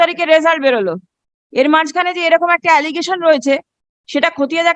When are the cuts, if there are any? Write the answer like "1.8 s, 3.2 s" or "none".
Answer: none